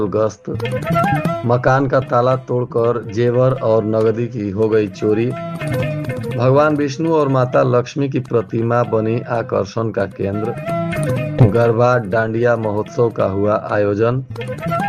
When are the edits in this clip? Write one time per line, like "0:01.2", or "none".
none